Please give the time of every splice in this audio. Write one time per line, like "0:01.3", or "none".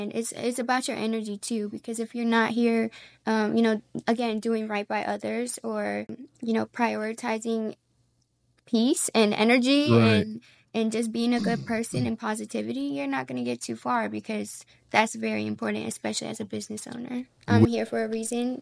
0:06.2
0:17.6